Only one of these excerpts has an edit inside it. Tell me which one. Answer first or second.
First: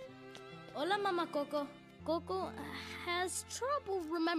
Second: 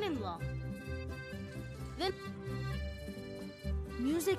first